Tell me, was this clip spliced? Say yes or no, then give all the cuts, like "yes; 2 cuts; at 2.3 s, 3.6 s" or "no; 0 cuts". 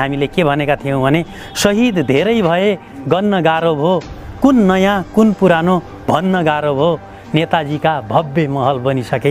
no; 0 cuts